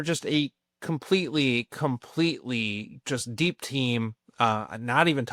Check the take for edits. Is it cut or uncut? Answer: uncut